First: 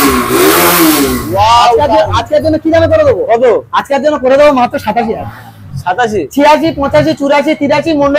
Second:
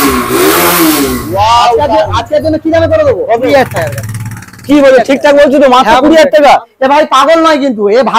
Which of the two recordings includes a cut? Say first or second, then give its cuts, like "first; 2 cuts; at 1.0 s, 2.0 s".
second; 2 cuts; at 3.5 s, 6.7 s